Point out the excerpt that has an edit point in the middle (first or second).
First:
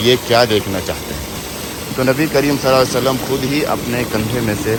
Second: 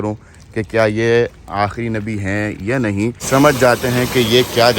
second